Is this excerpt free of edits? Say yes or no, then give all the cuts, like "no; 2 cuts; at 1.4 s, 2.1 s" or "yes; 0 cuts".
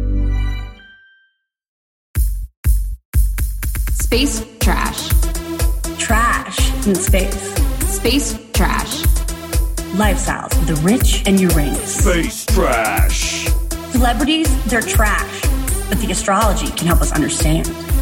no; 1 cut; at 1.9 s